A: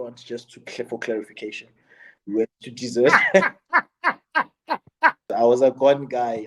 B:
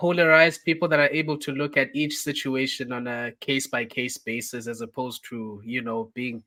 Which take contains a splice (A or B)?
A